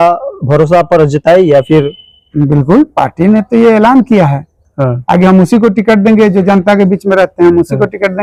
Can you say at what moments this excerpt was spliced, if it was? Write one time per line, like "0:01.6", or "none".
none